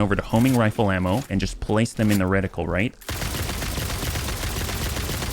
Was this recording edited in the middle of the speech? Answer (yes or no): yes